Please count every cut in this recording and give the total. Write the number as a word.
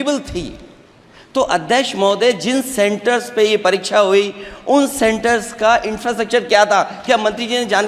zero